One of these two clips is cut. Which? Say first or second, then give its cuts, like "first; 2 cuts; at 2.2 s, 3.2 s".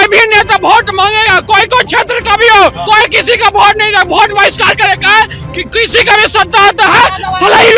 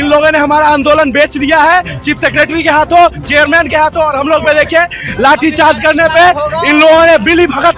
first; 1 cut; at 2.8 s